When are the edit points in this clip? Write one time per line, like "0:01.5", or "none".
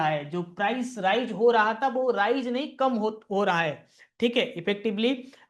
none